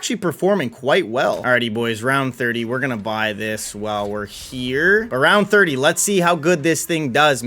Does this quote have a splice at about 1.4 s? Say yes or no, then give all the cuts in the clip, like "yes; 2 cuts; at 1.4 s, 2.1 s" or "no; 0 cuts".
yes; 1 cut; at 1.4 s